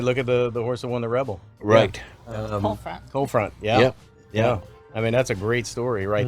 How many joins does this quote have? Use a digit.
1